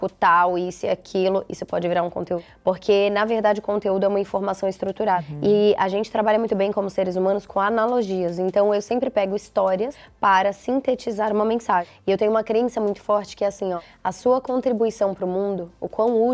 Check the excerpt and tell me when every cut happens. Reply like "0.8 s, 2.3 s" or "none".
2.5 s, 5.3 s, 10.0 s, 11.9 s, 13.9 s